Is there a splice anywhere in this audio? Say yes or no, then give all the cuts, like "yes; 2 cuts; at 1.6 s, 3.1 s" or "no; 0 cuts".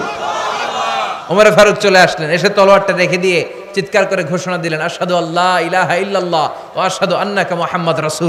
no; 0 cuts